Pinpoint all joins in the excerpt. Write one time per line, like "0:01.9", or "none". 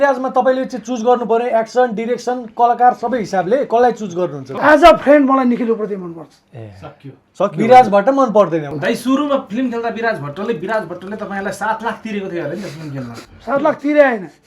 0:04.5
0:08.7